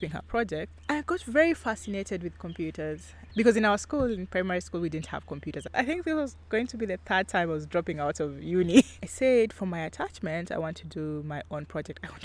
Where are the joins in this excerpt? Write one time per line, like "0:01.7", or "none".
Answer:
0:03.2
0:05.7
0:09.0